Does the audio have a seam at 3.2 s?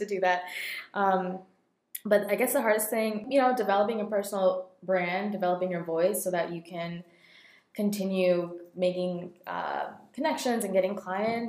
yes; 1 cut; at 3.2 s

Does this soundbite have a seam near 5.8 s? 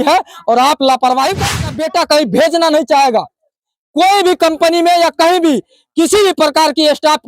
no; 1 cut; at 1.5 s

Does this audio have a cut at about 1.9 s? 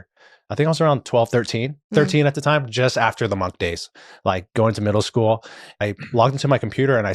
no; 1 cut; at 5.7 s

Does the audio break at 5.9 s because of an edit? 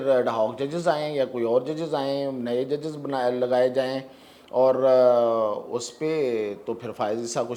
no; 0 cuts

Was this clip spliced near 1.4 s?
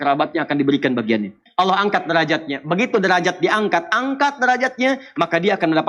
yes; 1 cut; at 1.4 s

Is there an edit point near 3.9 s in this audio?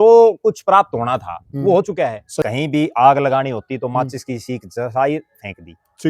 no; 1 cut; at 2.4 s

